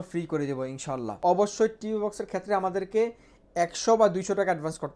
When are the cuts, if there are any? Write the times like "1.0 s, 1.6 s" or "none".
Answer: 1.1 s